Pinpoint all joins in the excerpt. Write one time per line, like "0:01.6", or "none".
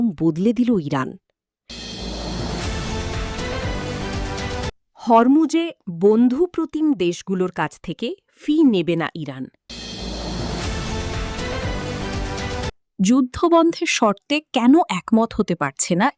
0:01.9
0:04.8
0:09.8
0:12.9